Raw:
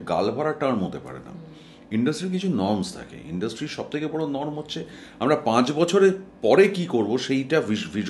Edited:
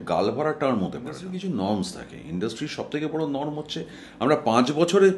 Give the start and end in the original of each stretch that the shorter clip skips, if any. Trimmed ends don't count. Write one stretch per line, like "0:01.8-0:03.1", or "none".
0:01.3-0:02.3

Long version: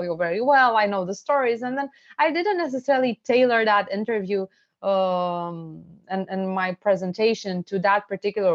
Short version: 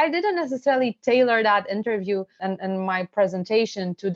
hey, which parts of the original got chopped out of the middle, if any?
0:04.5-0:06.0

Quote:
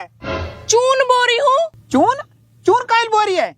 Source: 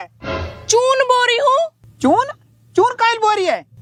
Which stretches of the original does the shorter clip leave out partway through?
0:01.8-0:01.9

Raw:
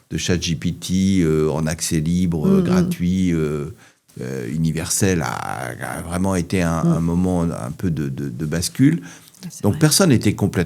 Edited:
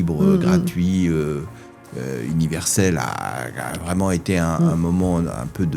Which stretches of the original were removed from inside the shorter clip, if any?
none

